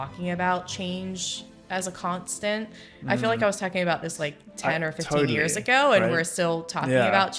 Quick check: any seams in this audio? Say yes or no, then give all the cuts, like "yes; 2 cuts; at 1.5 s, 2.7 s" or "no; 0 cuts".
no; 0 cuts